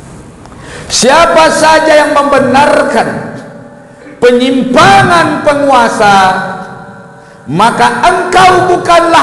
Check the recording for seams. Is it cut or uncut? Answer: uncut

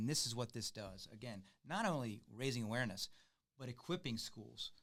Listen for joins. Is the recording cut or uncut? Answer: uncut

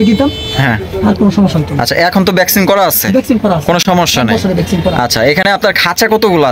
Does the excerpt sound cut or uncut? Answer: uncut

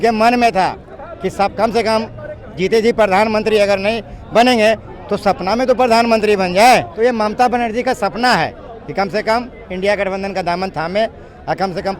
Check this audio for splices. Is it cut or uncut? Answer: cut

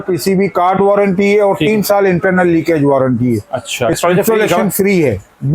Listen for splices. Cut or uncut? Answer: cut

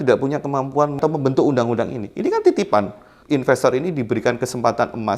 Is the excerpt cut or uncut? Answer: cut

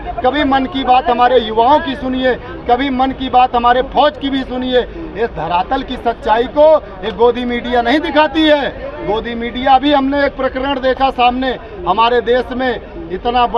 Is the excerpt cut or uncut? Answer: uncut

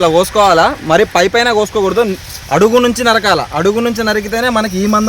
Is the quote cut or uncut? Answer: uncut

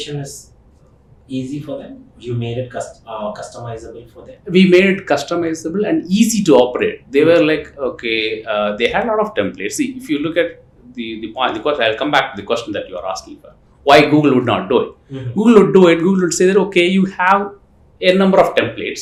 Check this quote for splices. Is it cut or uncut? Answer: uncut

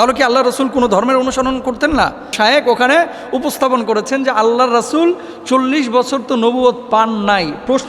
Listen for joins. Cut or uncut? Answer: cut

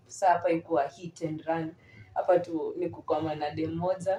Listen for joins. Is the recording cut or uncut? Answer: uncut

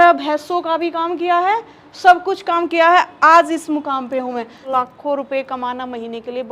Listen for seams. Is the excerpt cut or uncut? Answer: cut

